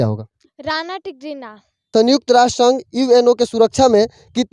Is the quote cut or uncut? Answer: cut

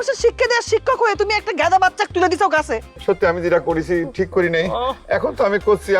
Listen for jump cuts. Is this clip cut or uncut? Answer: cut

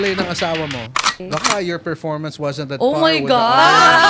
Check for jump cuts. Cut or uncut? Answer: cut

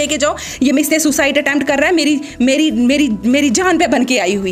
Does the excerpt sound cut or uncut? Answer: uncut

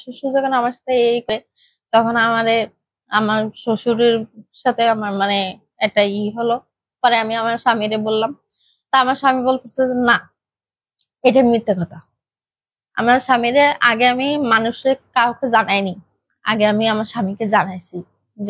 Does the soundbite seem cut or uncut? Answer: cut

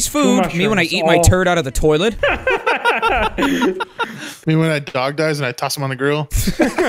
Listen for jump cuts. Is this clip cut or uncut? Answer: cut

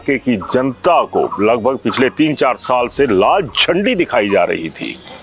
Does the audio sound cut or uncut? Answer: uncut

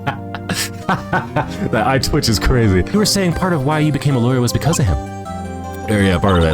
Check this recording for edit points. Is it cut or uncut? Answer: cut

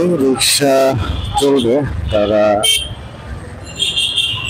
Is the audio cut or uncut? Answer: uncut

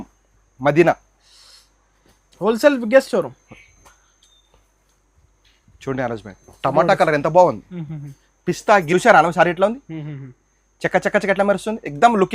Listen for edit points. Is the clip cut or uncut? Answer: cut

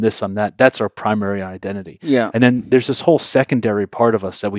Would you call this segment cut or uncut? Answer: uncut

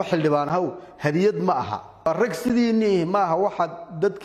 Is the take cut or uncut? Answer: cut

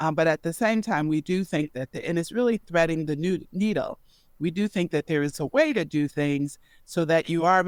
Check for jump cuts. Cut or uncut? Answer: uncut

